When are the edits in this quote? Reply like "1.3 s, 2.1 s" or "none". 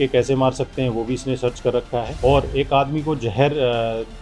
2.1 s